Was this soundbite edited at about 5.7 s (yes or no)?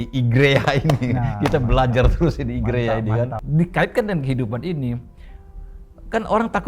no